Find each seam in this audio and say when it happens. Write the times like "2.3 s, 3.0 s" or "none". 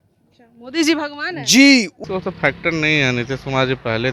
2.0 s